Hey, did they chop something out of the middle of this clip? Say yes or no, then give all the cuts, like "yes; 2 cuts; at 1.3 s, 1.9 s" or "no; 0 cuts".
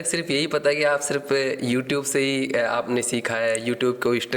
no; 0 cuts